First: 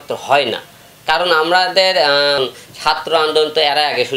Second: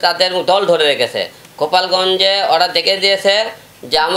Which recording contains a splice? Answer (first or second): first